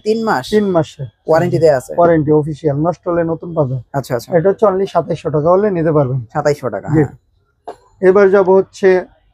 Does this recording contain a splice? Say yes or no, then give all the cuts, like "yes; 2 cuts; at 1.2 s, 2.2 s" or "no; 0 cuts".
no; 0 cuts